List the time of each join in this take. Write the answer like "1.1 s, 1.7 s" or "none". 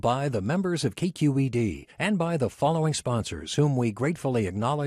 none